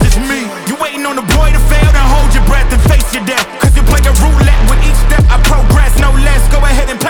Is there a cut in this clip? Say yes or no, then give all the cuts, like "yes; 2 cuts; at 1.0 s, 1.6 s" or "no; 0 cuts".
no; 0 cuts